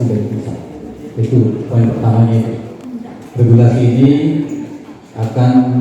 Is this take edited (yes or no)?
no